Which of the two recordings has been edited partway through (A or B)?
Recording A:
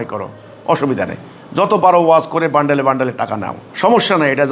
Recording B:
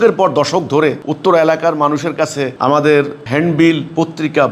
B